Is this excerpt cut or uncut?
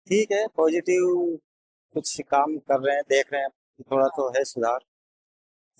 uncut